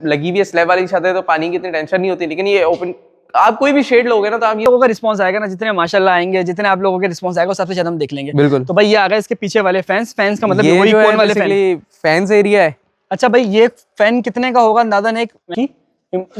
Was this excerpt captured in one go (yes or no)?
no